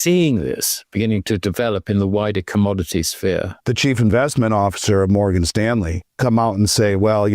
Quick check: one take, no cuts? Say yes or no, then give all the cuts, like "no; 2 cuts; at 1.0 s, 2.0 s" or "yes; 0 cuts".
no; 1 cut; at 3.6 s